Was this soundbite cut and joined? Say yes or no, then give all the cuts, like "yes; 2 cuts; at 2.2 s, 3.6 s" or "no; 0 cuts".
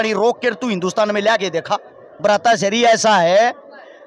yes; 1 cut; at 2.1 s